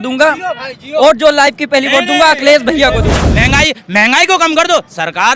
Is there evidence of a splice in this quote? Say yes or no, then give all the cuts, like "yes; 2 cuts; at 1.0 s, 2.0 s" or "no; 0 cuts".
yes; 1 cut; at 3.3 s